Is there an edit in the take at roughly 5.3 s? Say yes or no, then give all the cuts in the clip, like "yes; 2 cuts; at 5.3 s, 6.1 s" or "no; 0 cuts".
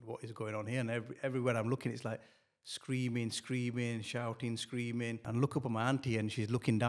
yes; 1 cut; at 5.3 s